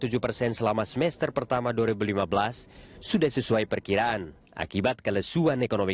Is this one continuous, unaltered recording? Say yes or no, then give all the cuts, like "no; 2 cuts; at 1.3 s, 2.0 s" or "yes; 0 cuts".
yes; 0 cuts